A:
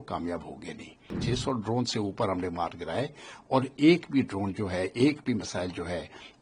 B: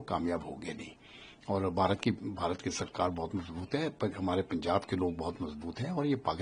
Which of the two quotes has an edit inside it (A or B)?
A